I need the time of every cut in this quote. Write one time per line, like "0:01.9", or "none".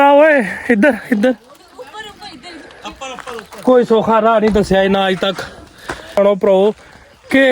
0:06.2